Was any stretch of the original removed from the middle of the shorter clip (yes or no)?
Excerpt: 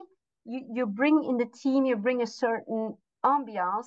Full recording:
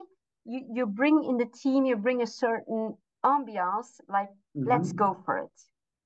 no